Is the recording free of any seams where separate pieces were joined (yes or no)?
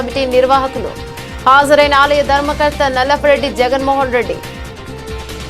no